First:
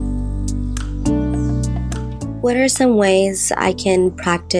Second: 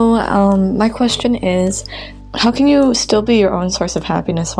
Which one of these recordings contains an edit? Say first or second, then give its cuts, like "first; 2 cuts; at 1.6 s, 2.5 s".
first; 1 cut; at 2.3 s